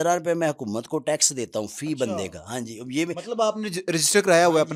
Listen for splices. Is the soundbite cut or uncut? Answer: uncut